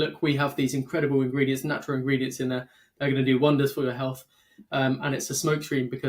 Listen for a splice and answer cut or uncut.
uncut